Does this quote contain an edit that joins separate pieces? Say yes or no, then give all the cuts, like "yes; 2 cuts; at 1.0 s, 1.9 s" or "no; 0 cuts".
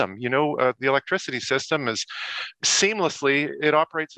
yes; 1 cut; at 2.4 s